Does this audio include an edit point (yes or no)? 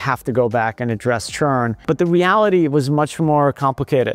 yes